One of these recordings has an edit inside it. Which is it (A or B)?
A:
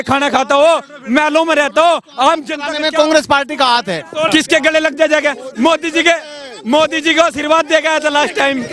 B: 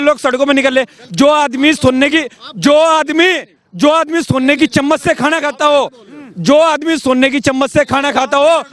A